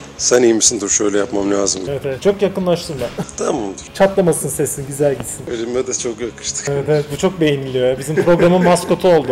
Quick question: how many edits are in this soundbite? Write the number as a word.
one